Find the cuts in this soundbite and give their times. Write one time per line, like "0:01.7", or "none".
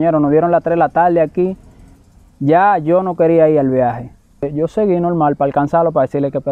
0:04.5